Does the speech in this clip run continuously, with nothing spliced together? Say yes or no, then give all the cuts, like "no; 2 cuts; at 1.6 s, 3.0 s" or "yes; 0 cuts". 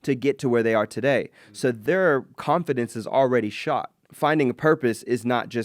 no; 2 cuts; at 1.8 s, 4.0 s